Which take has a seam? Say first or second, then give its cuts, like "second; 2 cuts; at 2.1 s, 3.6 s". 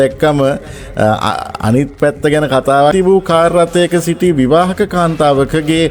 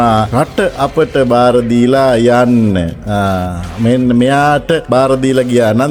first; 1 cut; at 2.9 s